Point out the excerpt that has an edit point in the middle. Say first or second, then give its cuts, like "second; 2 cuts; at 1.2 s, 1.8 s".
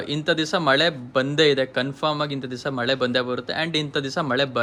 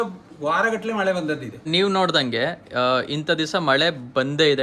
second; 1 cut; at 1.7 s